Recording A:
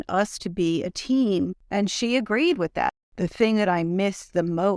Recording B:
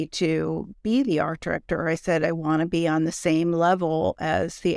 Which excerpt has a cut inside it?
A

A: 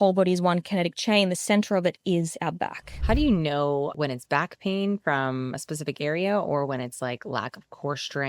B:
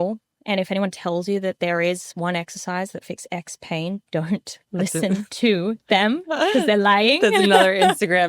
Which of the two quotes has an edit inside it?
A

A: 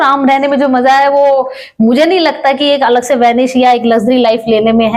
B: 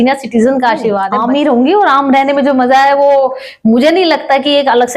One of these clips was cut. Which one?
B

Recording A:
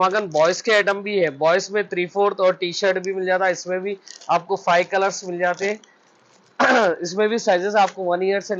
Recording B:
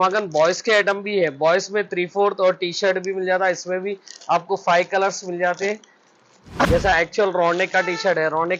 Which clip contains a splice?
B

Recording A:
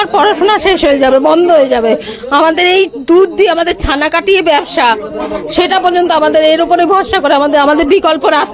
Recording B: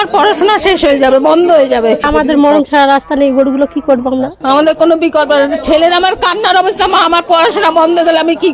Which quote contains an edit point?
B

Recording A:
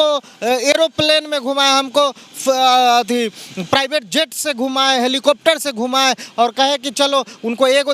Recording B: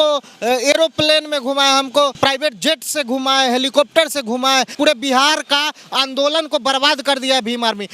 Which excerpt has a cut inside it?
B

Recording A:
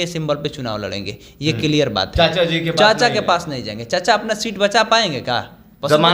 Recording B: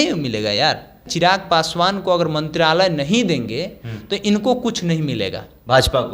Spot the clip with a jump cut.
B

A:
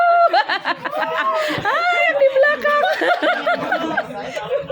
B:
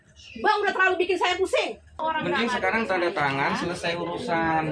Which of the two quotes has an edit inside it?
B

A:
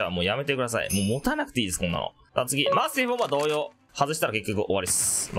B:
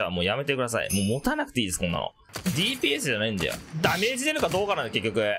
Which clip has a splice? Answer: B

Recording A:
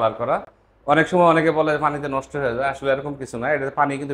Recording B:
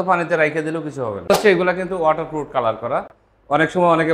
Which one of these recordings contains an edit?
B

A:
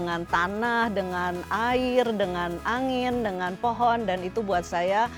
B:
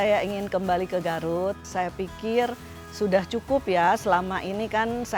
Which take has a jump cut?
B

